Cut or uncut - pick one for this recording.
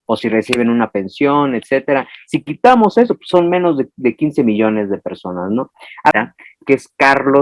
cut